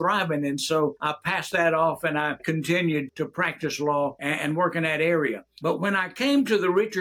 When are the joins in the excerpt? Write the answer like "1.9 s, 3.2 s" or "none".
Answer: 1.0 s, 2.4 s, 3.1 s, 4.2 s, 5.5 s